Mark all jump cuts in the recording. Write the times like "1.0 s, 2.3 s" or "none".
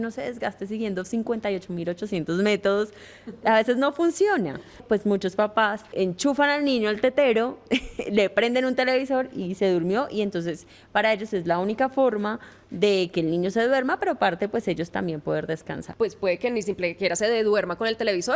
4.8 s, 5.9 s, 15.8 s